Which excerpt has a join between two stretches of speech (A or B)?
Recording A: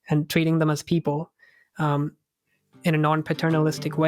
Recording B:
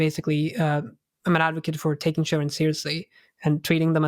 A